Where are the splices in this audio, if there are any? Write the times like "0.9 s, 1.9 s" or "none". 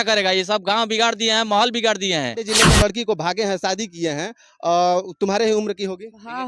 2.5 s